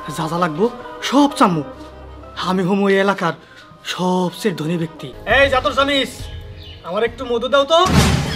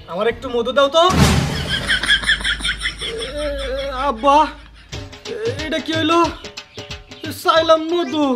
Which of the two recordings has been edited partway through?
first; 1 cut; at 5.1 s

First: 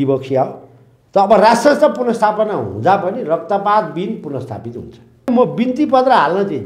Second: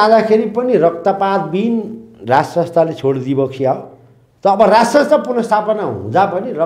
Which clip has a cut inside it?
first; 1 cut; at 5.3 s

